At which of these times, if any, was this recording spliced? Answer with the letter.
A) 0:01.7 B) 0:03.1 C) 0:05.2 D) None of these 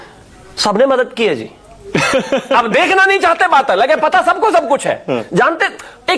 D